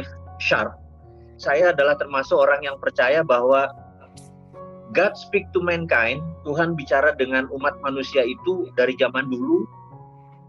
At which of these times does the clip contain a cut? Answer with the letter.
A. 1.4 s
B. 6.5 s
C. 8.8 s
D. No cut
A